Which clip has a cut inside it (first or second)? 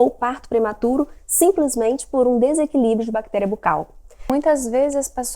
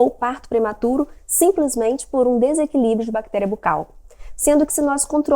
first